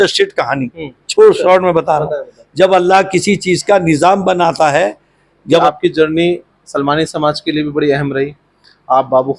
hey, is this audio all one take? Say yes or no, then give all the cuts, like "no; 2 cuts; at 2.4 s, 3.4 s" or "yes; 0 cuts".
no; 1 cut; at 5.6 s